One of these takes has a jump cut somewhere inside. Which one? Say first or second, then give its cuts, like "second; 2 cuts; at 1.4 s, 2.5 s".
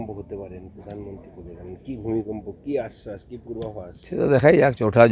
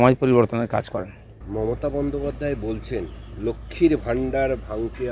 second; 1 cut; at 1.2 s